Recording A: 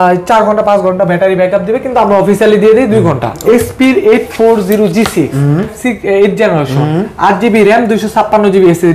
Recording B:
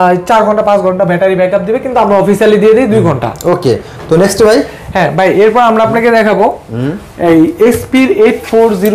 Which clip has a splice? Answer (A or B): A